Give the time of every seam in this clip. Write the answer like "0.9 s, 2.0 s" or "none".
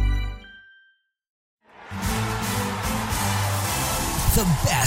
1.5 s